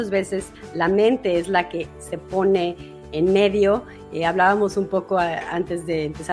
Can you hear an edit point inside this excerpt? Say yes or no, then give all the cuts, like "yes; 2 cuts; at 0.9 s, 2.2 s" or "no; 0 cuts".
no; 0 cuts